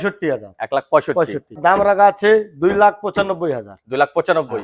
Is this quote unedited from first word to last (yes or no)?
no